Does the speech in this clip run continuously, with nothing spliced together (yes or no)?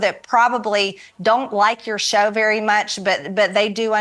yes